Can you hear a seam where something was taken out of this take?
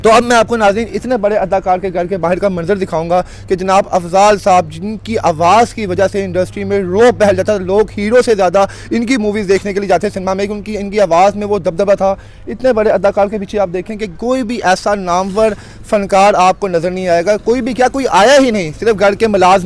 no; 0 cuts

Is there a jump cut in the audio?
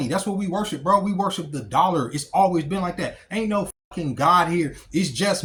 no; 0 cuts

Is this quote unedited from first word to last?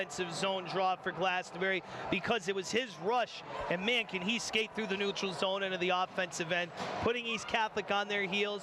yes; 0 cuts

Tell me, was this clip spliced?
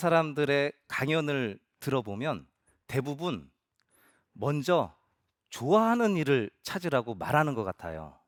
no; 0 cuts

